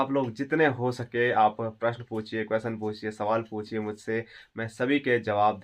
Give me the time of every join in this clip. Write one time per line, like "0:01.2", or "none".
none